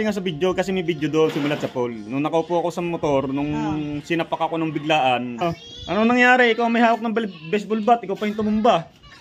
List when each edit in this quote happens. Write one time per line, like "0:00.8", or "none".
0:05.4